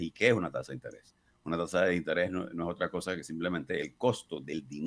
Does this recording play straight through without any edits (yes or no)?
yes